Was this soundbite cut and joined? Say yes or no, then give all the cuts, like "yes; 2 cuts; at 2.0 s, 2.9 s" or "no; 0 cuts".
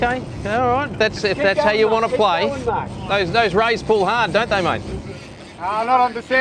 yes; 1 cut; at 2.9 s